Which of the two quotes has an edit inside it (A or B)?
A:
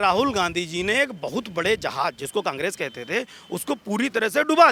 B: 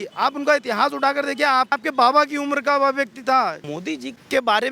B